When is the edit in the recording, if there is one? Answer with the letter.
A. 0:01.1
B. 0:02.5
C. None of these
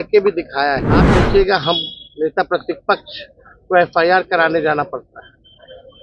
A